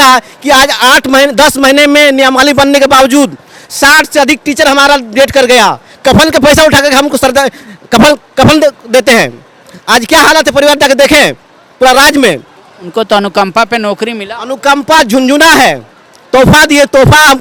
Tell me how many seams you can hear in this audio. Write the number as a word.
zero